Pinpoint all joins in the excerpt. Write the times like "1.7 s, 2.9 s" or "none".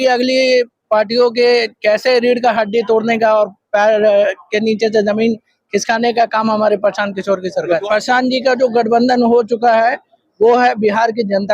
7.8 s